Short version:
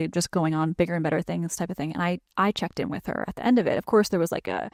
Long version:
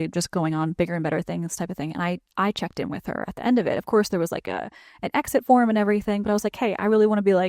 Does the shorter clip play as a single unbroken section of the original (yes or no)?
yes